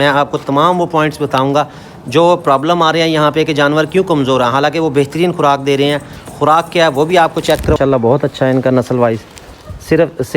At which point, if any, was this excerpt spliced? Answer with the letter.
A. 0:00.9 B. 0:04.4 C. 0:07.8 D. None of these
C